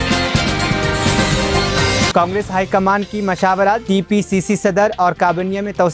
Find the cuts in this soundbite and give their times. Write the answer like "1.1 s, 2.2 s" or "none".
2.1 s